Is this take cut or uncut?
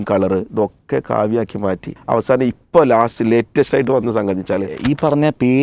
cut